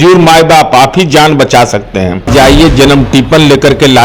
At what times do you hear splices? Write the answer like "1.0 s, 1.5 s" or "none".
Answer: 2.3 s